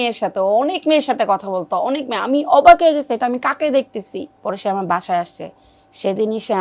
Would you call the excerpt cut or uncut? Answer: cut